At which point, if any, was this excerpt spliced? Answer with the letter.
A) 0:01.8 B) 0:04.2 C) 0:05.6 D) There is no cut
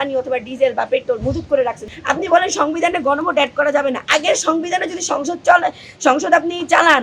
A